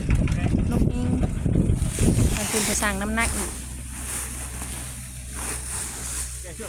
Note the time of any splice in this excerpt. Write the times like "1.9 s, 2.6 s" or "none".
2.8 s